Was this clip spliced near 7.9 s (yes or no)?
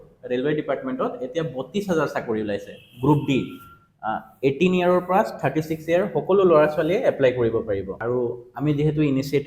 yes